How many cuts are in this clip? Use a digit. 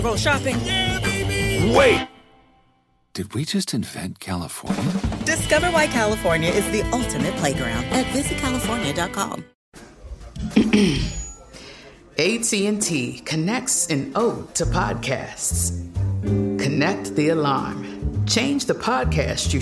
1